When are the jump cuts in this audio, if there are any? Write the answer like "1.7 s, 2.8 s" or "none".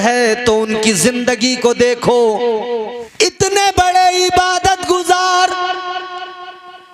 3.0 s